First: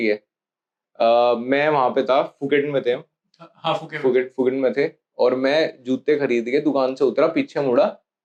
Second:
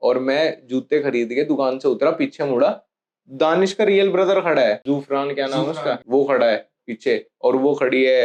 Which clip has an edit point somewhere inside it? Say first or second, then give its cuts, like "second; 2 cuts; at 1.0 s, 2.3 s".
second; 2 cuts; at 4.8 s, 6.0 s